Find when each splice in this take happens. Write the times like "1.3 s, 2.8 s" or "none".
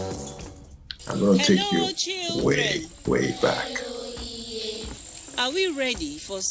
4.9 s